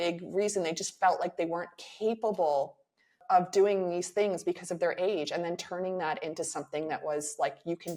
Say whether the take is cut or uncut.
uncut